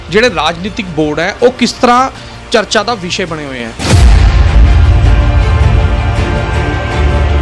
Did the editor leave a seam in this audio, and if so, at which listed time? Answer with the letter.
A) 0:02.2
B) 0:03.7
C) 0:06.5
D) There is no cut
B